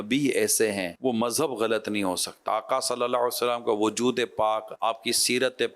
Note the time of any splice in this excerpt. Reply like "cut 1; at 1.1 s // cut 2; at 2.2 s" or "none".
cut 1; at 0.9 s // cut 2; at 2.4 s // cut 3; at 4.7 s